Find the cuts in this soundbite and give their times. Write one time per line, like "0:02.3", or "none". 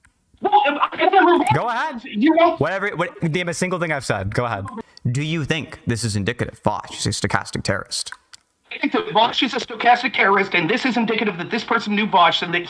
0:04.7